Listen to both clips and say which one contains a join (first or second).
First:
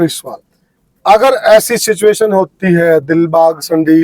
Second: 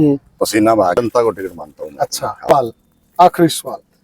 second